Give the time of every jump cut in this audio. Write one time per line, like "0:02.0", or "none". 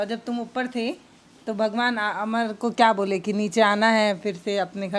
none